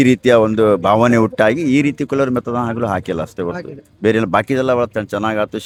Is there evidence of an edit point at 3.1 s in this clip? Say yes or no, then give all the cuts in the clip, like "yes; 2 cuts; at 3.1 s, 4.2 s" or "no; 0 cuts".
no; 0 cuts